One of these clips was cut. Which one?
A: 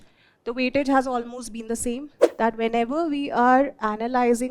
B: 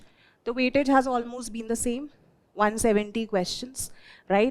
A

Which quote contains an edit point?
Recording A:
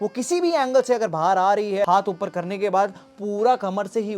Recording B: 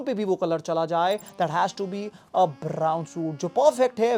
A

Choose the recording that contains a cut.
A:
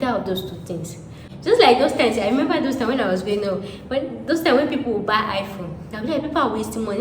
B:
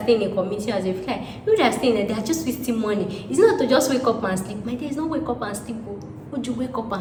A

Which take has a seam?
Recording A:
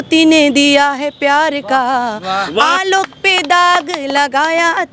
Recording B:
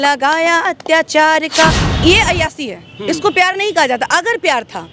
B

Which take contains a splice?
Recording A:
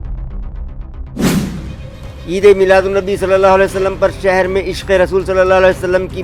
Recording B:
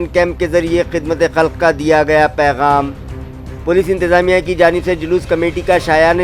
A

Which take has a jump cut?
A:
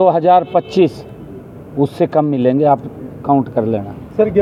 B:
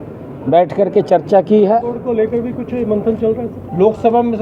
B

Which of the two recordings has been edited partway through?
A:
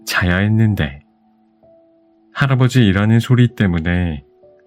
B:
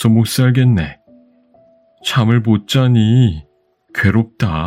A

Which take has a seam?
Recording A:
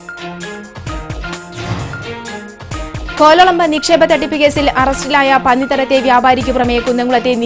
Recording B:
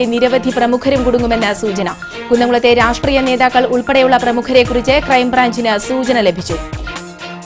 A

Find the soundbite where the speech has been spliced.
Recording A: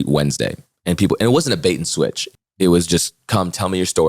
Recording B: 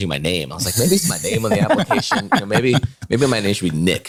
A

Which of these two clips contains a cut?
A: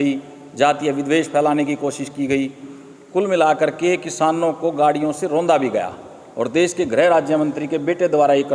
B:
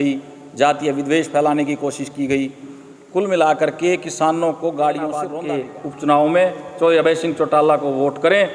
B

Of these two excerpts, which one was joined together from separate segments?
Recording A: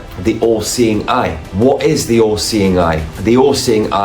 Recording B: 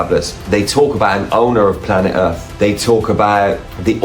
A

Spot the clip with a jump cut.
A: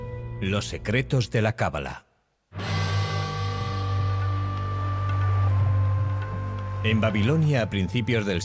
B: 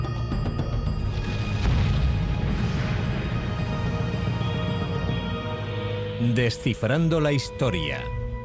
B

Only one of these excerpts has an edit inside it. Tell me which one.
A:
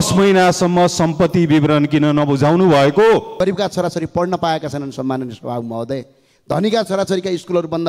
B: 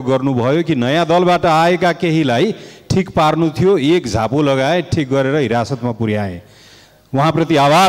A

